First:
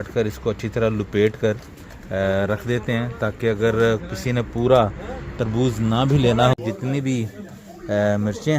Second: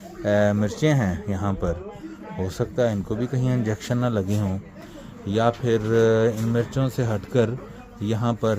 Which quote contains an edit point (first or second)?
first